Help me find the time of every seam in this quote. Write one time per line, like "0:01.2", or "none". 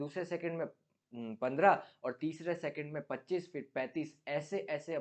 none